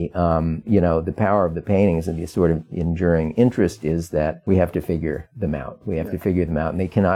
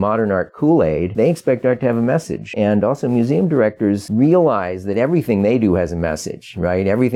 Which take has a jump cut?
first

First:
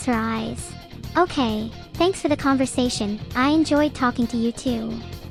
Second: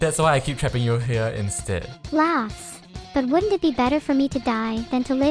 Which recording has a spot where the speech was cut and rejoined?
second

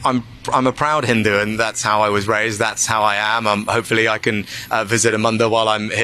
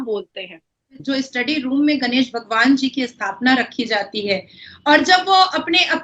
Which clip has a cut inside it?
second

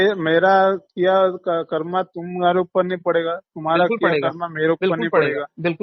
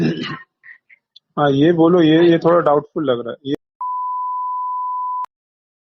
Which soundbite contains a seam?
second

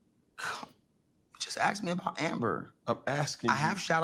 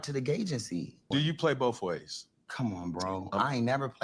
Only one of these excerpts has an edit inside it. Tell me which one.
second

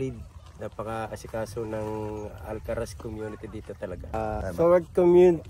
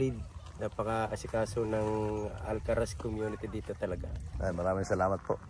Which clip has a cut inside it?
first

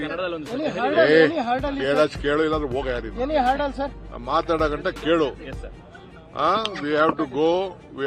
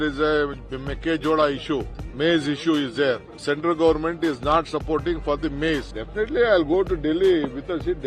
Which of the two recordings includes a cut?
second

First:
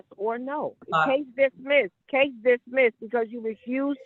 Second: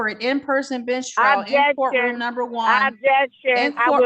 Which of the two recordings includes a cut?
first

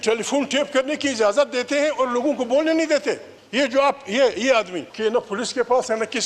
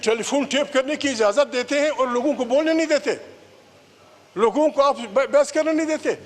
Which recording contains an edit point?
first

